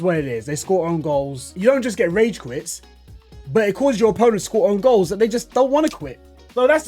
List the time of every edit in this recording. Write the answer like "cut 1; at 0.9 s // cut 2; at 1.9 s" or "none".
cut 1; at 1.4 s